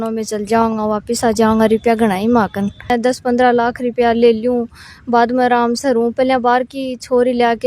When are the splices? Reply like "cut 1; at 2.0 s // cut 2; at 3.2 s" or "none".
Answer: cut 1; at 2.9 s